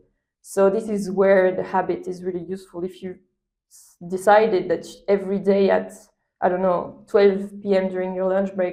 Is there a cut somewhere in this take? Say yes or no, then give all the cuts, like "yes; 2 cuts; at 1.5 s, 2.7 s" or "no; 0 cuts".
no; 0 cuts